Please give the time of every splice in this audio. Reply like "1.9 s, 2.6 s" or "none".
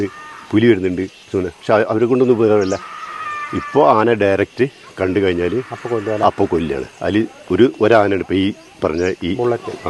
none